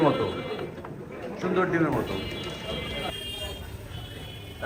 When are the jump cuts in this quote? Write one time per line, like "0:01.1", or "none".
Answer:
0:03.1